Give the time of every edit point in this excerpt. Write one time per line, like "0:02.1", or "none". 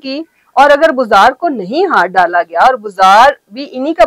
none